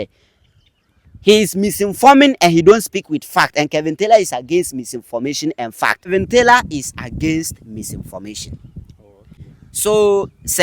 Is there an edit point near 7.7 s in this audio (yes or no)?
no